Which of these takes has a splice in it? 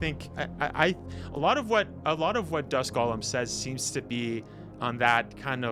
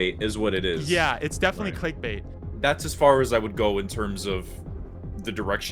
second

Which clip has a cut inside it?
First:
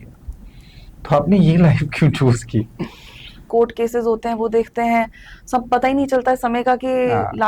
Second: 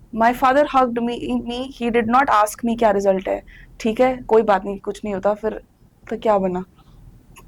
first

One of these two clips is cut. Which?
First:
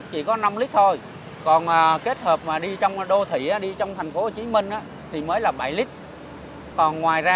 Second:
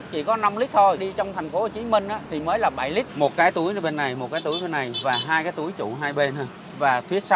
second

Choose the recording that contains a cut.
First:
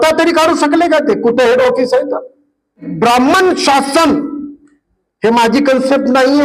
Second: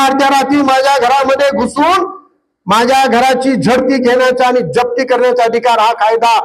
first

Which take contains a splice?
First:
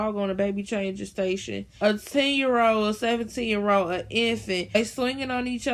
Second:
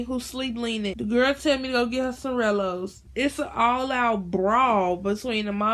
second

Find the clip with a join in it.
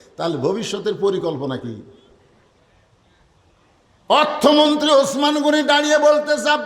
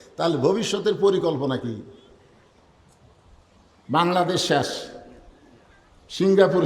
second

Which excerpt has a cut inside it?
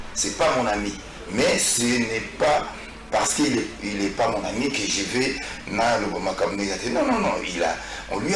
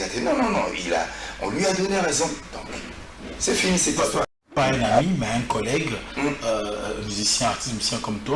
second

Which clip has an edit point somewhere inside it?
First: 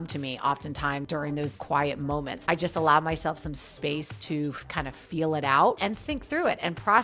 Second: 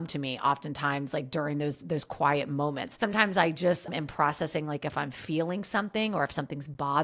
first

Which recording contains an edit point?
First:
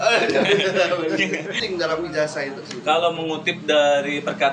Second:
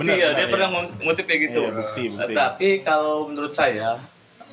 first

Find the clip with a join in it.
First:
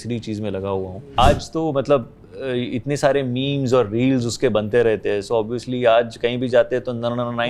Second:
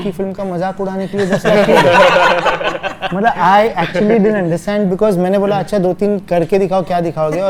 first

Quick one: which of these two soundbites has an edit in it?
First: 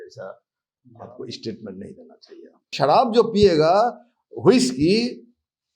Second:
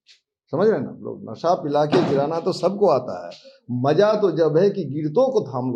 first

